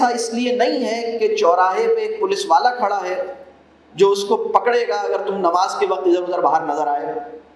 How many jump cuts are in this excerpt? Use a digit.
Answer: 0